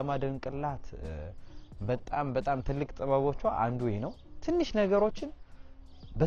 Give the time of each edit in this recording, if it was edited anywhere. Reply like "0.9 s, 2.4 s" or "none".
none